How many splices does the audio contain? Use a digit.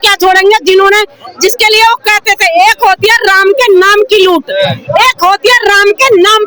0